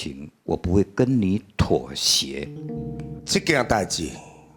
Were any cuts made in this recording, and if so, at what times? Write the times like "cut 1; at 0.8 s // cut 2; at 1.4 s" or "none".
cut 1; at 3.2 s